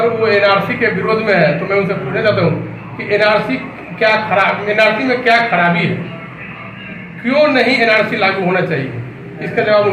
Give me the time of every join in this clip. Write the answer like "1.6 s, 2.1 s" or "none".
none